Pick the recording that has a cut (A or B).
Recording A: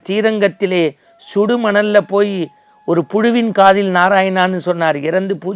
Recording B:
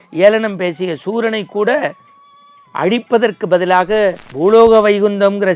B